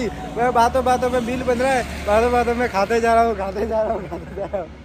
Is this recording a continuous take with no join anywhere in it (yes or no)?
yes